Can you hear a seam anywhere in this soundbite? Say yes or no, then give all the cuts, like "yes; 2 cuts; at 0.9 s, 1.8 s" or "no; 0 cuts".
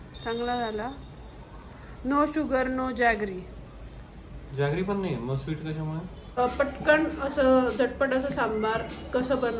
yes; 1 cut; at 6.4 s